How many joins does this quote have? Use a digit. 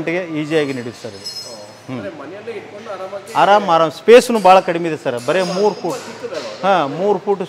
0